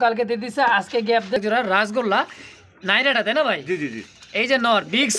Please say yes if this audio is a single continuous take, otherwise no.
no